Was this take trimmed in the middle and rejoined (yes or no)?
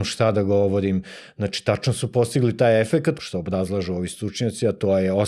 yes